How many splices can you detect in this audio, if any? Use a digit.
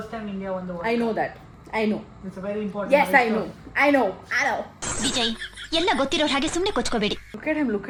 0